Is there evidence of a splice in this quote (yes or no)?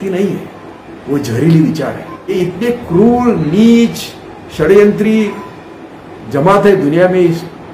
yes